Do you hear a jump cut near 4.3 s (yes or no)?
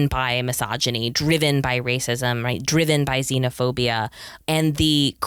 no